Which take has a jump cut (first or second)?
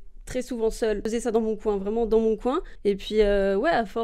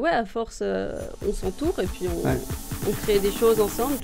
first